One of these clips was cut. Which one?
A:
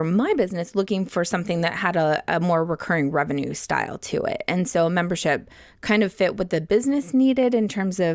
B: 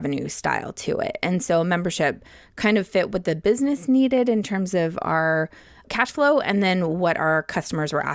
B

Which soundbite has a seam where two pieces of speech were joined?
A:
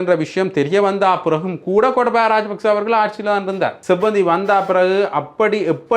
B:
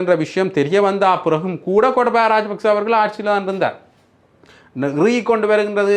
A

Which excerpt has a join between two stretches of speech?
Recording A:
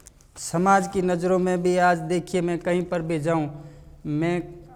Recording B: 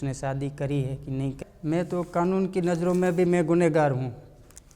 B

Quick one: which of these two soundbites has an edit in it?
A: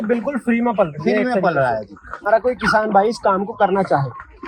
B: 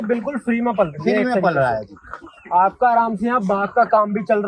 A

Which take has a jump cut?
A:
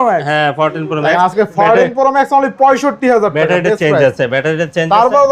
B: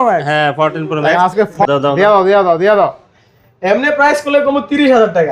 B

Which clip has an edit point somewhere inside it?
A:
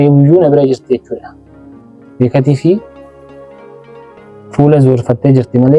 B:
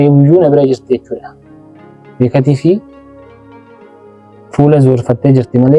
B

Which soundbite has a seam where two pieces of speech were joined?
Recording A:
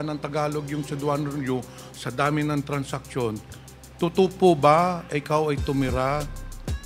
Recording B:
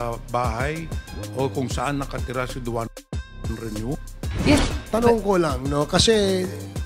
B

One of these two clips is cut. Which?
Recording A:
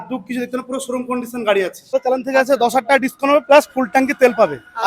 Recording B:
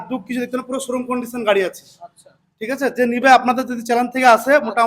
A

